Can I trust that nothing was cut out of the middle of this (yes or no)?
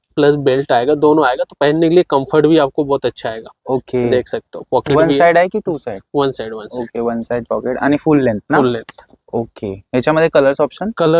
yes